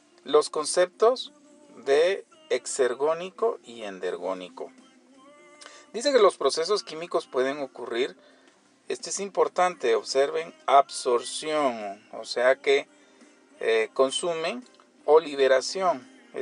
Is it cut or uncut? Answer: cut